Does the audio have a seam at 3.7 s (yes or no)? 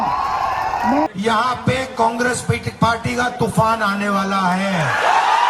no